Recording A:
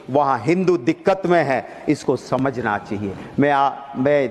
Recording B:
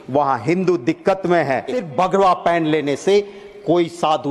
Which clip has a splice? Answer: B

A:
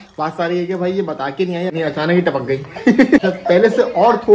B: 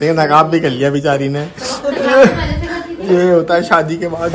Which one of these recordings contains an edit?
A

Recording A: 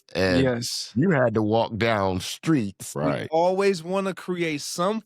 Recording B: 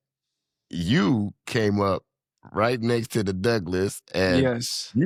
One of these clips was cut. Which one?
A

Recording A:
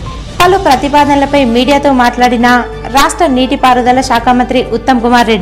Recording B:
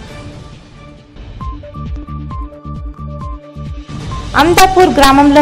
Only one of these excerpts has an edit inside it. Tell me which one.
B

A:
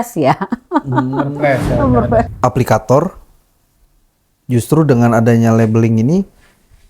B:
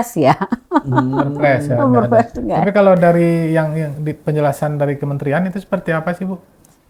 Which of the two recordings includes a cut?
A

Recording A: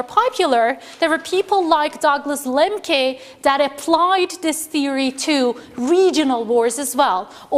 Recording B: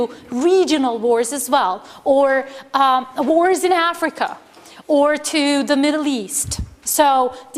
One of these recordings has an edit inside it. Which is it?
B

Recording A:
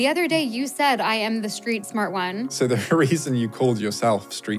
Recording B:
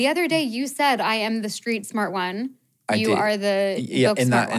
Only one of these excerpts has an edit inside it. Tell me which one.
A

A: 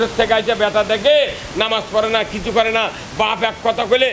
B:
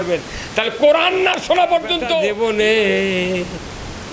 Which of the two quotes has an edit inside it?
B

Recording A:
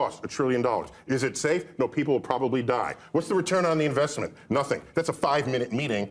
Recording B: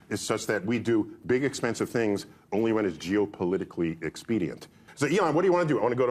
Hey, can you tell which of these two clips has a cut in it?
B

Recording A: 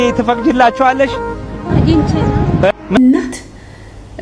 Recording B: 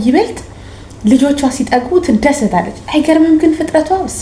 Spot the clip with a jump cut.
A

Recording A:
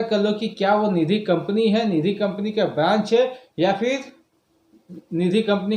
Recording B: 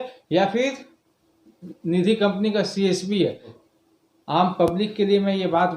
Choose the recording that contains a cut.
B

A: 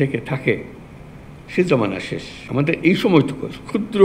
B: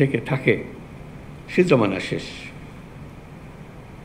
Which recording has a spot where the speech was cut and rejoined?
A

